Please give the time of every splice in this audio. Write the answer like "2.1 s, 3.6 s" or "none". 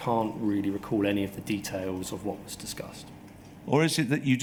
none